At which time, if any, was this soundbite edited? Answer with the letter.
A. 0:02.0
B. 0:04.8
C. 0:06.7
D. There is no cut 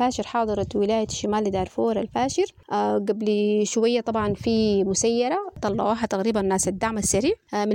D